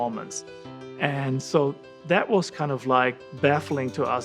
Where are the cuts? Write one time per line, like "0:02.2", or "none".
none